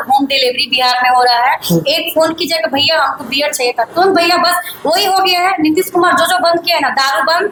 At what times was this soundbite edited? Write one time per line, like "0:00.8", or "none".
none